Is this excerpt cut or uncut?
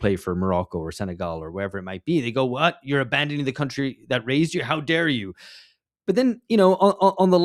uncut